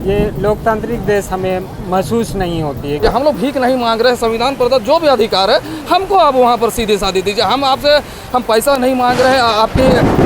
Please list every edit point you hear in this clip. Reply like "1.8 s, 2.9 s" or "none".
3.0 s